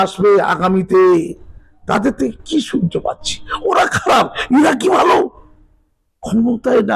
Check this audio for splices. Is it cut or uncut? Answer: uncut